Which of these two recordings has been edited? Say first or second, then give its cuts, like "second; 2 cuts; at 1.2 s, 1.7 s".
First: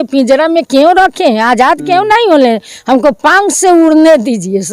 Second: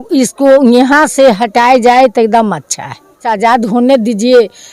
second; 1 cut; at 3.3 s